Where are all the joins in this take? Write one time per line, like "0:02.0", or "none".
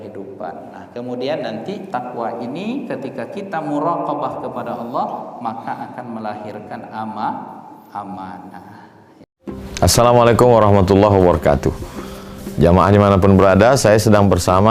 0:09.1